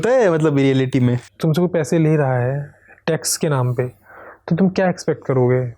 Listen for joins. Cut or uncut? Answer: cut